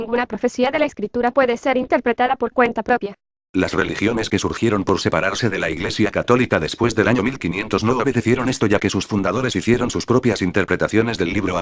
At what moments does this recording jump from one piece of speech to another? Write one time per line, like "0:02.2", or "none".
0:08.7